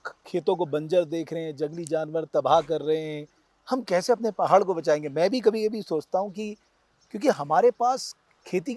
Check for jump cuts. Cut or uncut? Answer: uncut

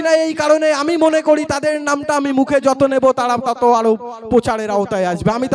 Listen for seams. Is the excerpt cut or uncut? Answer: uncut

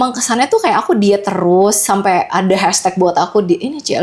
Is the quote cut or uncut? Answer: uncut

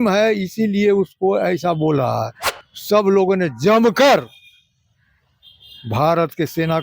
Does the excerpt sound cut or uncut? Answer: cut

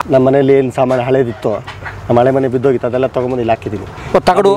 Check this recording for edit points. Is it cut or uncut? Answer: uncut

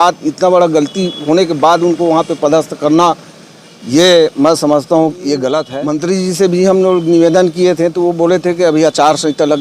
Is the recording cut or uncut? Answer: cut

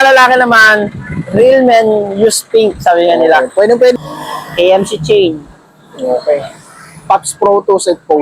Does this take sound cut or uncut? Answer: cut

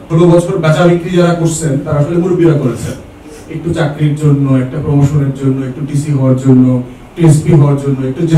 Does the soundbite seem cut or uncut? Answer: uncut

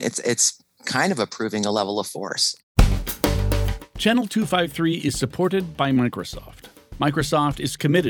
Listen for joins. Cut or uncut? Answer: cut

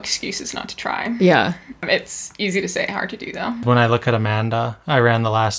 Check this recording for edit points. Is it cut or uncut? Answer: cut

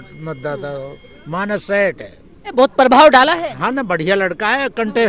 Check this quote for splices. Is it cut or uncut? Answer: cut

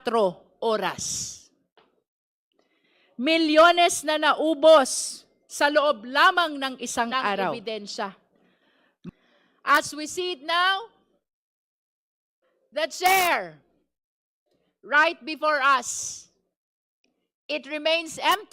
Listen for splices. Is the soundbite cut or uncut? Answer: cut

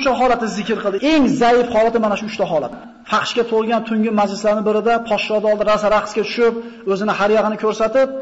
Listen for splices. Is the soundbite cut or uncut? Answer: cut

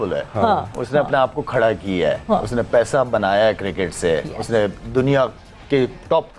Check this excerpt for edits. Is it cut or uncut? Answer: uncut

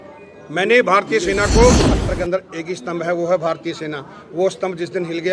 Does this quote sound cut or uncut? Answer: cut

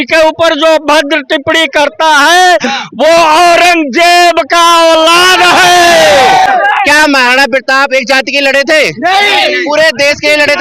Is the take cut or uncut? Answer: cut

